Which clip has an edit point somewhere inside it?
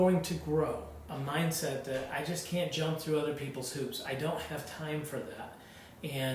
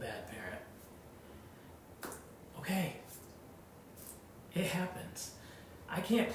first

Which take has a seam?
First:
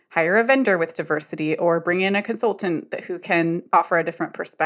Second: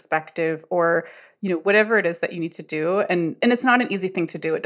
second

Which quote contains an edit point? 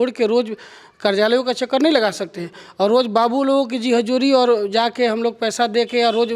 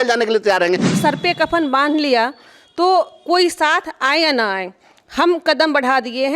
second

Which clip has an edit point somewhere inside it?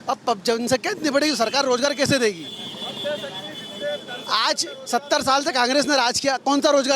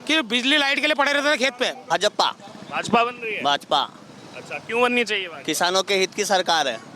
second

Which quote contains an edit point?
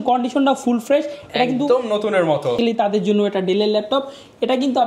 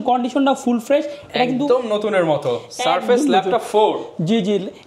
first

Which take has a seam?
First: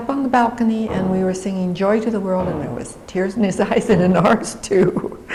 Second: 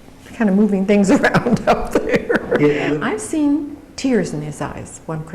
second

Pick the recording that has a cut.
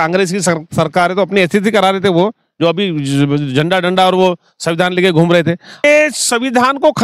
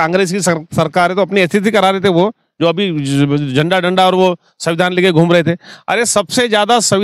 first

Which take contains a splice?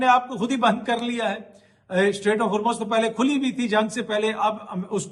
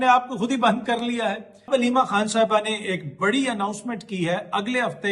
second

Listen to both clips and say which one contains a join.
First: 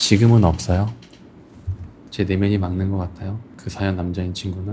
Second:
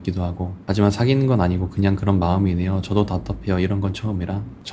first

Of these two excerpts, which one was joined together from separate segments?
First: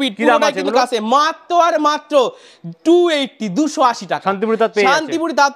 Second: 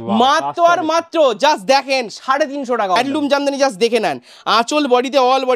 second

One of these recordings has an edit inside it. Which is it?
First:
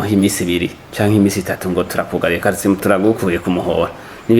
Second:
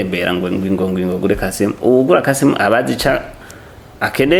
first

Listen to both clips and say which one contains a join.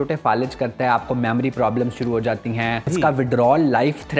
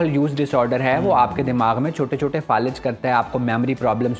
first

